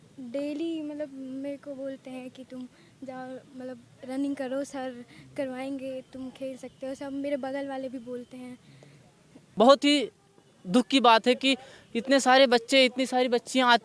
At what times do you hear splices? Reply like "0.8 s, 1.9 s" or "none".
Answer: 9.4 s